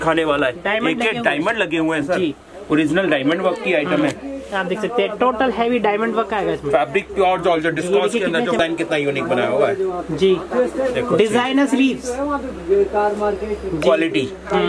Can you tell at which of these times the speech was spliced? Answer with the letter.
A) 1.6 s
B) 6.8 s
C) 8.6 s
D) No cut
C